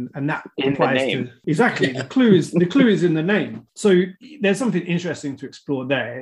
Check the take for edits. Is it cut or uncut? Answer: cut